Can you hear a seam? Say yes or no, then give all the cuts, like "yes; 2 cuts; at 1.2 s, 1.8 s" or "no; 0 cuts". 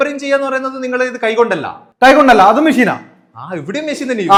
no; 0 cuts